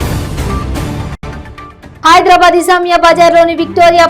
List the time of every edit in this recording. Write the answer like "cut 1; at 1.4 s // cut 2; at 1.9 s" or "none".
cut 1; at 1.1 s